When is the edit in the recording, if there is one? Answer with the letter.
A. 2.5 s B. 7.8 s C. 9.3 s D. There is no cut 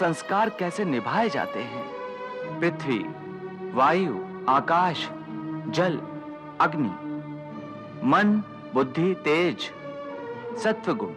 A